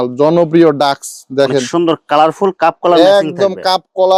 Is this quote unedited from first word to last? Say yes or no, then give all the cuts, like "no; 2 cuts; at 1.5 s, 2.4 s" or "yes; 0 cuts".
yes; 0 cuts